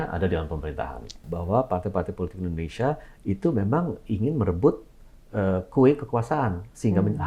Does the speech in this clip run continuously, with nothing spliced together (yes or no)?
no